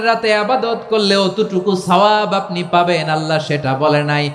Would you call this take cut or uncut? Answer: uncut